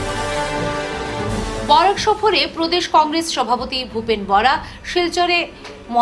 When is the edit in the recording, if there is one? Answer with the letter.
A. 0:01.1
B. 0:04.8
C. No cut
A